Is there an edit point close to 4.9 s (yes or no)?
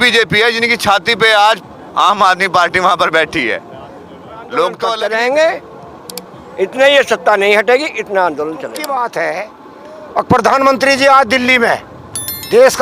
yes